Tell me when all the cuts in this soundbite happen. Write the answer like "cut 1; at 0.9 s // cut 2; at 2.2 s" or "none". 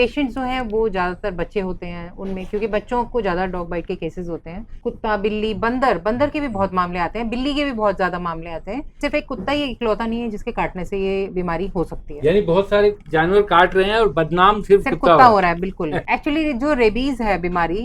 cut 1; at 4.7 s // cut 2; at 9.0 s // cut 3; at 16.0 s